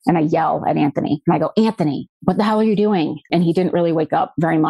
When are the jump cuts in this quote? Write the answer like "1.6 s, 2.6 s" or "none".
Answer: none